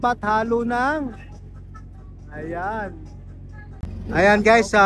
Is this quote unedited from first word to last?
no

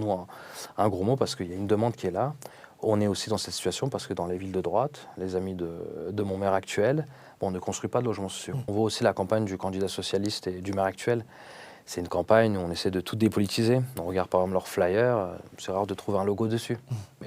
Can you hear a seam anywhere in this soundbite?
yes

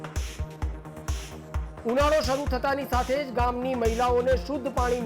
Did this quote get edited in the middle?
yes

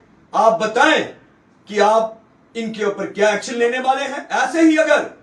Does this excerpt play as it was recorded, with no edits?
no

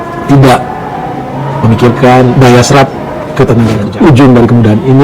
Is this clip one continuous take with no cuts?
no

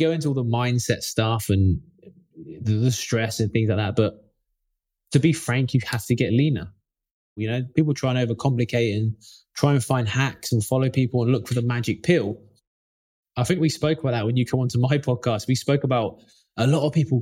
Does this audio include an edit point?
yes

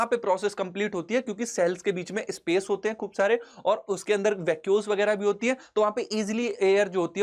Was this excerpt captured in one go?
yes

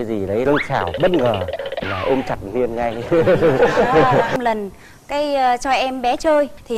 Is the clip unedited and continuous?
no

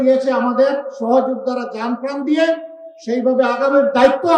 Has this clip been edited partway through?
no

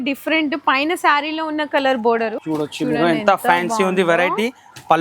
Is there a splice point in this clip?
yes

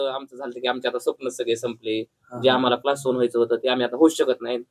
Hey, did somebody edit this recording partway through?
no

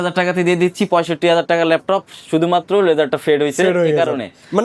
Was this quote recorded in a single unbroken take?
yes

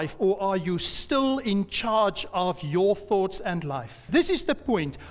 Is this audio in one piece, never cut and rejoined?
no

